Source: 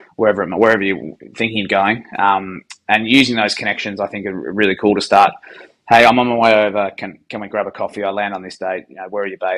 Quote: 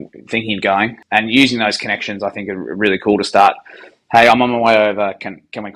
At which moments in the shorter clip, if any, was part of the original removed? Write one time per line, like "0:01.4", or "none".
0:01.0